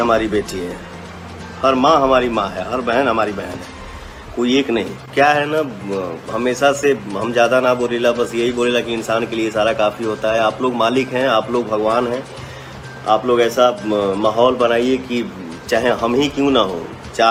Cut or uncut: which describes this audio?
uncut